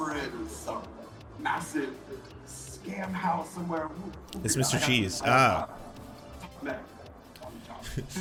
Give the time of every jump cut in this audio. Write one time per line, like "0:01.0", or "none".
none